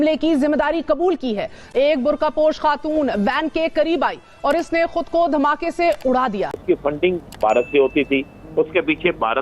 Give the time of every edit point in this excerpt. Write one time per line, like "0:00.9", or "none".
0:01.6
0:06.6